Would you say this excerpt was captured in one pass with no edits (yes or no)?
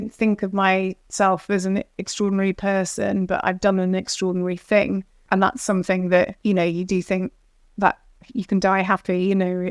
no